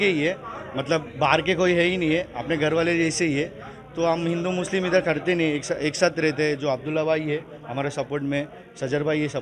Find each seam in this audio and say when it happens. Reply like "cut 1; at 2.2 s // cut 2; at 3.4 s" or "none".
none